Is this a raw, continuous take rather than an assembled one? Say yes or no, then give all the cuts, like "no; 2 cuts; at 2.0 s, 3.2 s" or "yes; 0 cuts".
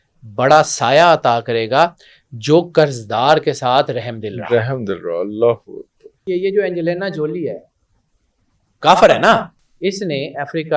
no; 2 cuts; at 6.3 s, 9.6 s